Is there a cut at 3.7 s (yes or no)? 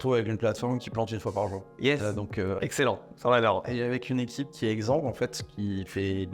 yes